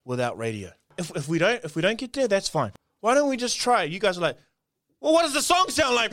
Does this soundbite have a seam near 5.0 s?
no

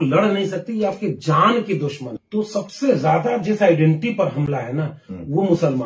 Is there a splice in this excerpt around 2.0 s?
yes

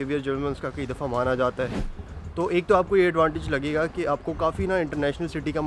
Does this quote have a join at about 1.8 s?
yes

